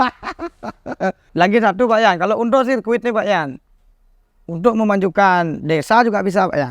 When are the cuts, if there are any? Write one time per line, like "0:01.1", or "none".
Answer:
0:01.3